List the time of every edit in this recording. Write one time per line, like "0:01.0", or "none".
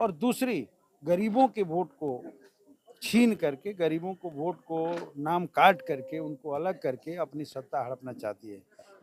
none

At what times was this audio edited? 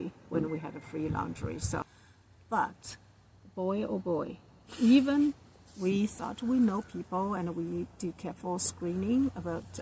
0:01.8

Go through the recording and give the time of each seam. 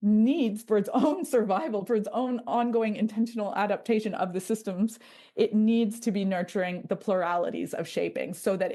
none

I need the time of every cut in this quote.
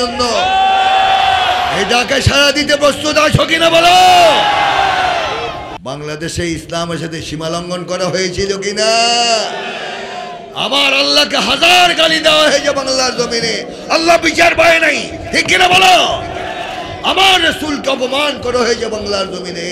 0:05.7

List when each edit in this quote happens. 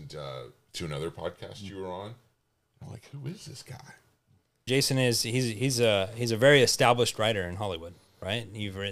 0:04.5

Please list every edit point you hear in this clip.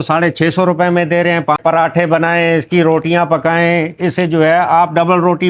0:01.6

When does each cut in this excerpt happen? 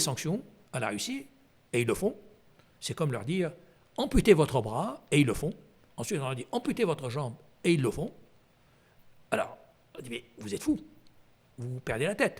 none

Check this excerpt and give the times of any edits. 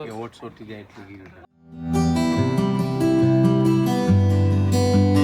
0:01.9

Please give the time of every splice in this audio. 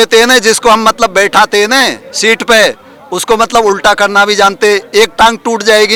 none

